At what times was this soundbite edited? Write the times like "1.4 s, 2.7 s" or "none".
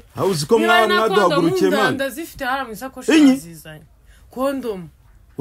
none